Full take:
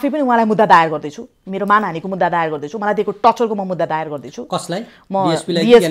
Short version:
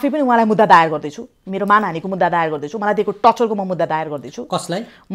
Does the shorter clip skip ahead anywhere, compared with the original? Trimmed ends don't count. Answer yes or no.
no